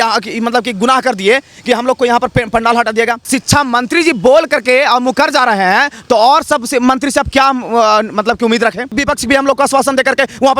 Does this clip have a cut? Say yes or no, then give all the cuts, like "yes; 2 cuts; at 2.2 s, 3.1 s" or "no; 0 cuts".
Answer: yes; 2 cuts; at 3.3 s, 8.9 s